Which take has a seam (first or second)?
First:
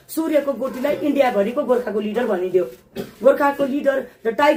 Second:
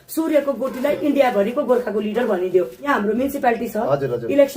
second